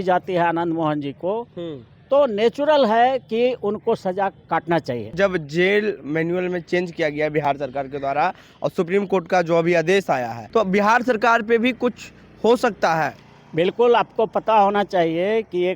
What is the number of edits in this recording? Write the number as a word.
two